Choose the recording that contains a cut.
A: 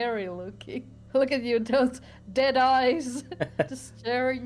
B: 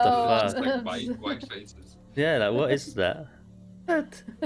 A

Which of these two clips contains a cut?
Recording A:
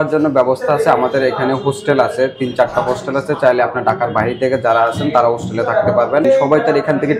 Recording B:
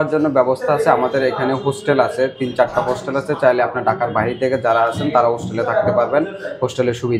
A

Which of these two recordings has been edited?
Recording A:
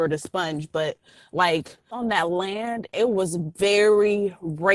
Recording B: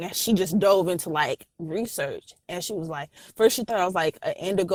A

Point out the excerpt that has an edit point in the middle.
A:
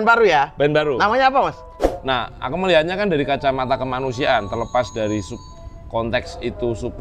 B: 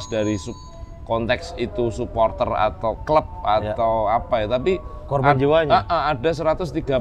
A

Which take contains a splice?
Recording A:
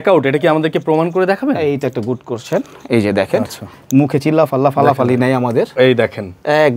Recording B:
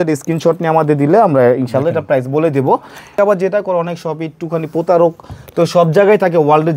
B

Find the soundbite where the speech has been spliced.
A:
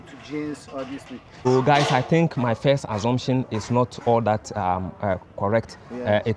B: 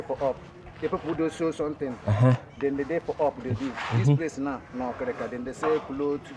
A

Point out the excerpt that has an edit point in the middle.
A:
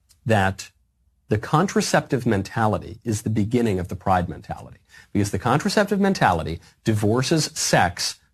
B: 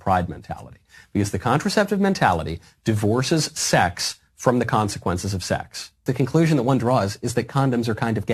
B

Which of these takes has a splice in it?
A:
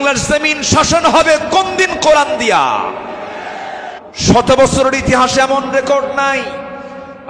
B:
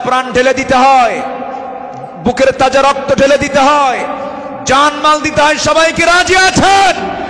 A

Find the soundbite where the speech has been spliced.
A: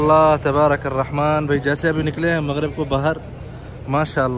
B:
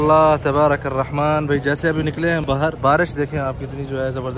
B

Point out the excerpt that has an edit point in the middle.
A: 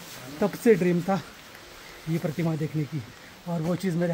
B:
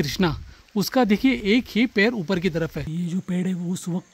B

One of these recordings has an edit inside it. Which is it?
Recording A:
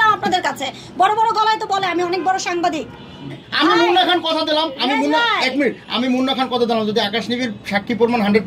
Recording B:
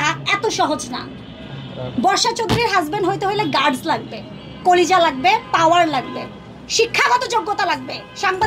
A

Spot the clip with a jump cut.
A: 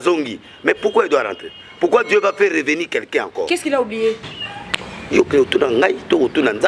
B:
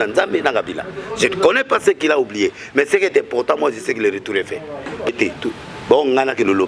B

